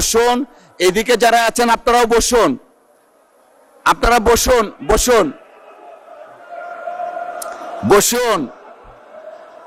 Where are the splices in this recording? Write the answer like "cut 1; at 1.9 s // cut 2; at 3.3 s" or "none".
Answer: none

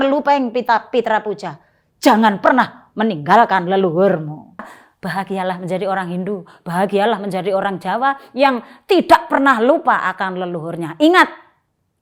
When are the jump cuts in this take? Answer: cut 1; at 4.8 s

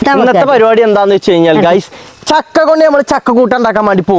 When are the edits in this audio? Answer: none

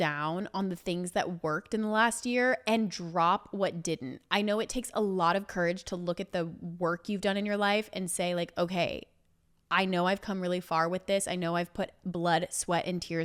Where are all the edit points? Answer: none

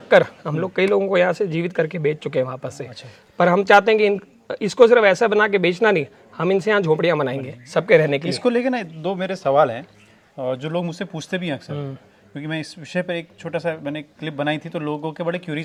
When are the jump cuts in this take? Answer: none

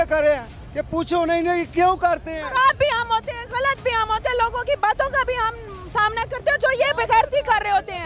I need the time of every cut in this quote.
none

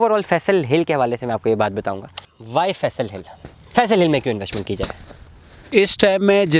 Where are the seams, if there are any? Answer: cut 1; at 2.3 s

